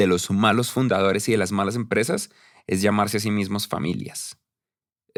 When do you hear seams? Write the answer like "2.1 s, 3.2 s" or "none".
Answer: none